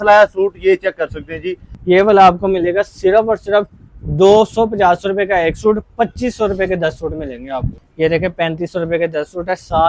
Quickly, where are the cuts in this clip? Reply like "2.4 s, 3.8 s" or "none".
1.7 s, 7.8 s

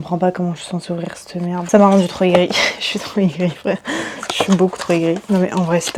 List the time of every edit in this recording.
none

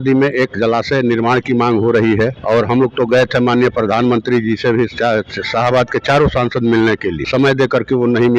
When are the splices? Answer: 2.4 s, 7.2 s

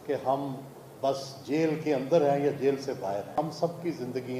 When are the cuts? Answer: 3.3 s

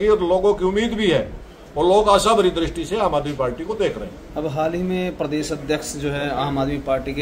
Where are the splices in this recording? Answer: none

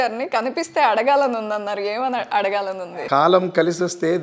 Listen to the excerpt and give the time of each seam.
2.9 s

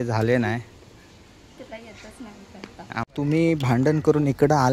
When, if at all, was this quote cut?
3.0 s

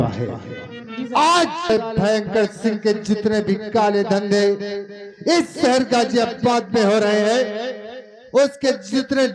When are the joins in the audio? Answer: 1.7 s

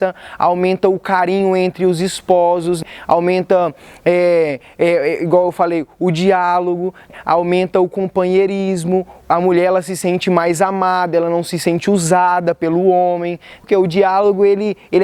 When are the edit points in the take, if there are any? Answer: 2.8 s, 7.1 s, 13.5 s

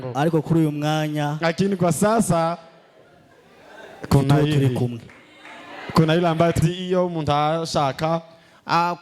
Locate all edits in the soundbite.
6.6 s

